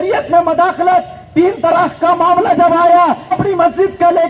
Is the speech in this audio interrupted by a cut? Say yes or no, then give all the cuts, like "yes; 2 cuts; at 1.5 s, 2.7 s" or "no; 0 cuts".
yes; 1 cut; at 3.3 s